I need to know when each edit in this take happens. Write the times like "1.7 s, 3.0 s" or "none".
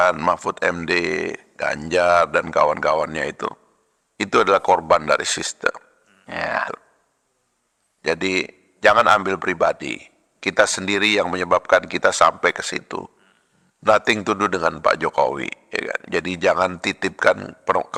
none